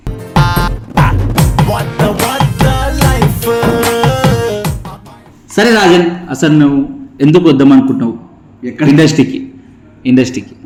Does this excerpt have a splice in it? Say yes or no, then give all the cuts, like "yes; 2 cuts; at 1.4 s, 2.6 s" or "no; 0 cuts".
no; 0 cuts